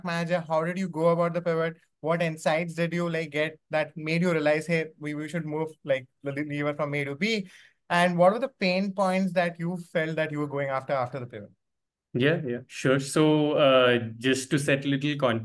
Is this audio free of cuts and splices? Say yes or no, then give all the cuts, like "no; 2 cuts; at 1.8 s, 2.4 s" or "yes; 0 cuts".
yes; 0 cuts